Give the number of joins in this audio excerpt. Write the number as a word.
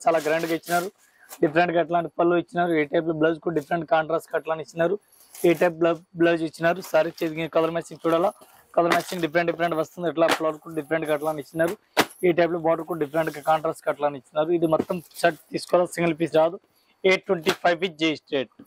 zero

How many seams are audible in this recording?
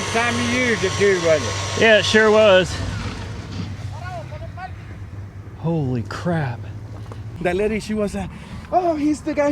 one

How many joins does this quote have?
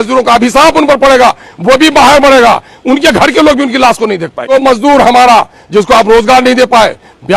one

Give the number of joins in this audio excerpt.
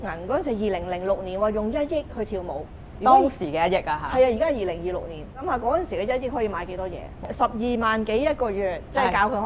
two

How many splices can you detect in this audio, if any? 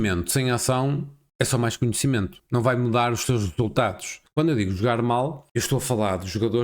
four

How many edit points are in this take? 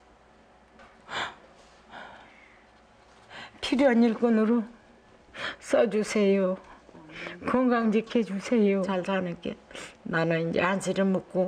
one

